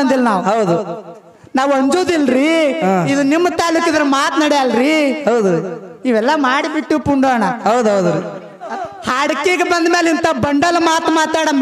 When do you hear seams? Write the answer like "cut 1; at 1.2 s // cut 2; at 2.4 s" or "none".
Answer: cut 1; at 8.7 s

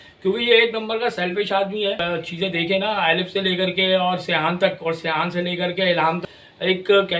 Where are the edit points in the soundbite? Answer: cut 1; at 2.0 s // cut 2; at 6.3 s

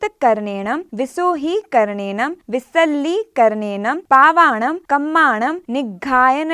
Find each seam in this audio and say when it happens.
cut 1; at 0.9 s // cut 2; at 2.4 s // cut 3; at 4.0 s // cut 4; at 4.8 s // cut 5; at 5.6 s

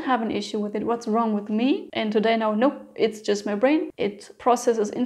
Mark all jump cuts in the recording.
cut 1; at 1.9 s // cut 2; at 3.9 s

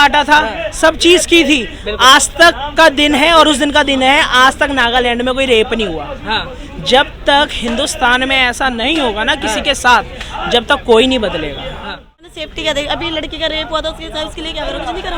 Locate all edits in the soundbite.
cut 1; at 12.2 s

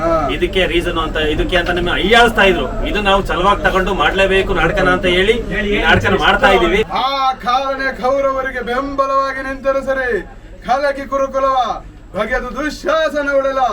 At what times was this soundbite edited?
cut 1; at 6.9 s

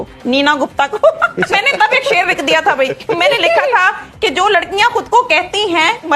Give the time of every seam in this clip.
cut 1; at 1.5 s

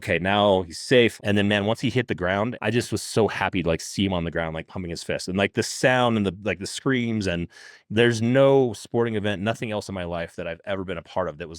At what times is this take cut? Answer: cut 1; at 1.1 s // cut 2; at 2.6 s

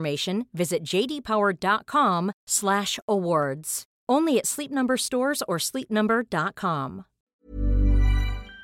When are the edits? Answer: cut 1; at 7.1 s

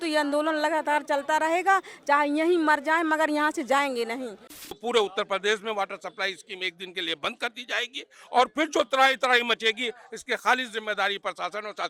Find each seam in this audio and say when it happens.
cut 1; at 4.7 s

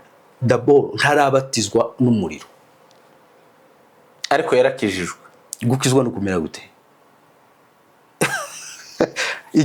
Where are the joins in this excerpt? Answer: none

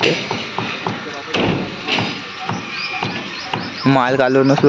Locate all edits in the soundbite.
none

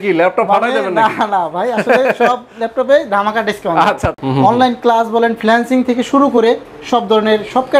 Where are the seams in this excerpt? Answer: cut 1; at 4.1 s

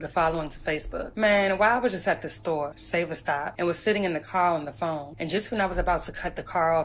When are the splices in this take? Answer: cut 1; at 1.0 s // cut 2; at 3.0 s // cut 3; at 5.1 s

